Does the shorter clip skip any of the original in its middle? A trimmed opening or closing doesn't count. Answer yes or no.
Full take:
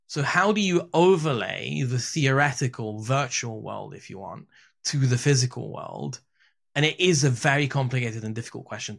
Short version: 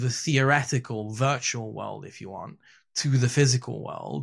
no